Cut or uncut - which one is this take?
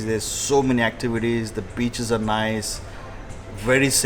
uncut